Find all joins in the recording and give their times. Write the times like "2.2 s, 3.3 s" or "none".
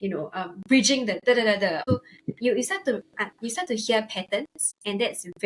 1.8 s